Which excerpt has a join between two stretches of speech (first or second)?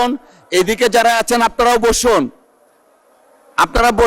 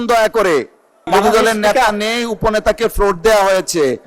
second